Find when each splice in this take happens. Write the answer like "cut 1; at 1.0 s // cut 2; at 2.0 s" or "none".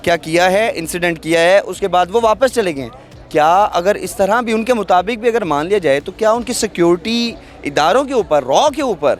none